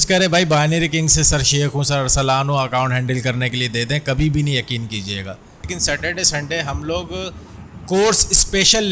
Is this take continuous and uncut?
no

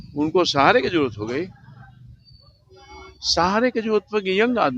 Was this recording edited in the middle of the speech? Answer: no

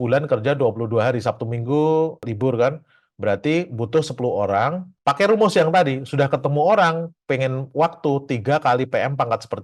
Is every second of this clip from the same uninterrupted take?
yes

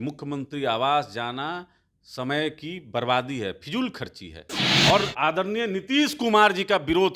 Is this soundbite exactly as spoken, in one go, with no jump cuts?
no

